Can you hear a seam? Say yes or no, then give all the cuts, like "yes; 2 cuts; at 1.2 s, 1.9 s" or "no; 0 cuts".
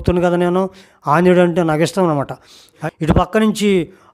yes; 1 cut; at 2.8 s